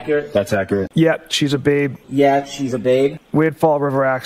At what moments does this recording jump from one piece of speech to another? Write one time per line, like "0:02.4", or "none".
0:00.9
0:03.2

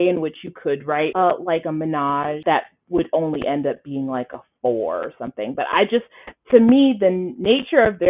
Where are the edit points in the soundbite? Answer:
0:01.1
0:02.4

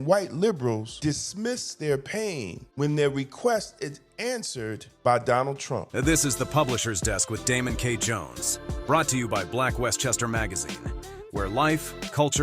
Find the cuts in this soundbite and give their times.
0:05.8

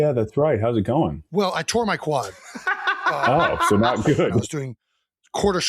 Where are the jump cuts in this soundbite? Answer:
0:01.2
0:04.4

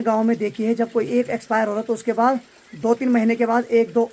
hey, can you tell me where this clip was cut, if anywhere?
none

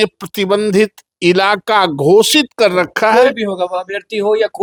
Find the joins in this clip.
none

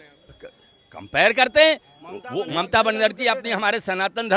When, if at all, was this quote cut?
0:02.5

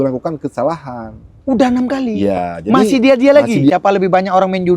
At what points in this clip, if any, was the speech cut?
0:03.7

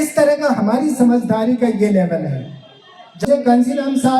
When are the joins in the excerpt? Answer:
0:03.2

